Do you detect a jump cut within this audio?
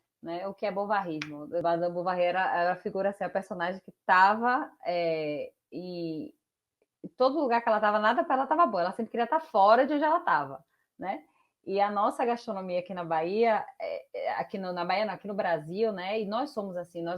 yes; 1 cut; at 1.6 s

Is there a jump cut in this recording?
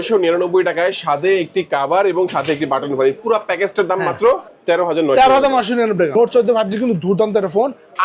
yes; 2 cuts; at 4.5 s, 6.1 s

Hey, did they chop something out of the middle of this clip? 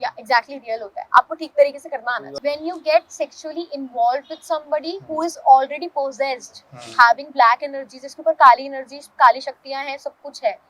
yes; 1 cut; at 2.2 s

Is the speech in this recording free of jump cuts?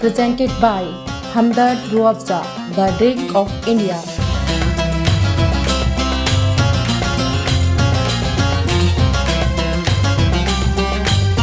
yes; 0 cuts

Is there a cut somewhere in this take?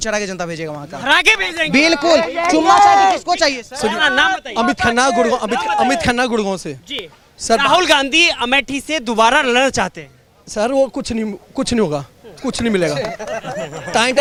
no; 0 cuts

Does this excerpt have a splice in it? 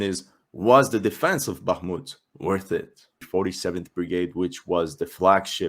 yes; 1 cut; at 3.2 s

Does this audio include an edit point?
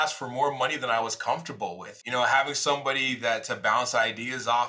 no; 0 cuts

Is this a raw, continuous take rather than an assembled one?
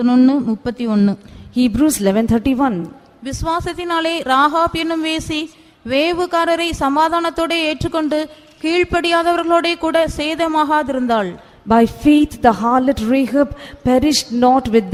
yes; 0 cuts

